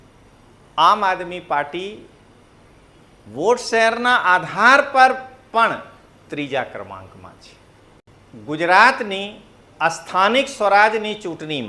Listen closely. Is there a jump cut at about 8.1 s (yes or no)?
yes